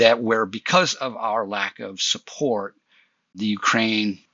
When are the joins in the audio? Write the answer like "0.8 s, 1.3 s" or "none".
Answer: none